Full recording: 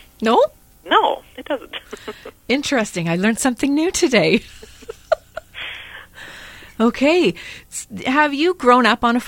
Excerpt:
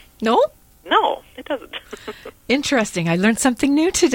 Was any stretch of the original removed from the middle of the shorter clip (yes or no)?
no